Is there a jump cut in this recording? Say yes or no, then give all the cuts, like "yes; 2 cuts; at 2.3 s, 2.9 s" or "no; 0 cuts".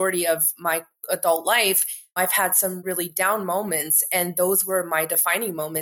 no; 0 cuts